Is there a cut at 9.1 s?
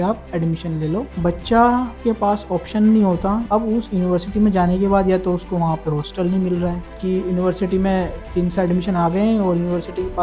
no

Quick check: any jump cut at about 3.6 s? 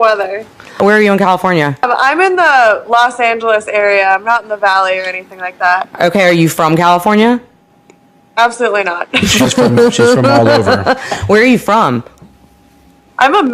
no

